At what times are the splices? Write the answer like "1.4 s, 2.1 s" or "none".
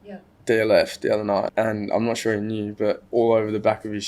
1.5 s, 3.0 s